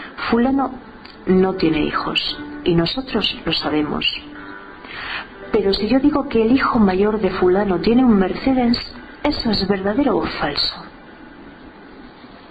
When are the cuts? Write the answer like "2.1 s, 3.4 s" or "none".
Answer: 7.5 s